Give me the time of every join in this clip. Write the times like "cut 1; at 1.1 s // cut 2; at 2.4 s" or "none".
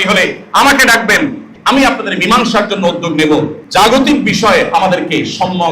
cut 1; at 1.5 s // cut 2; at 3.6 s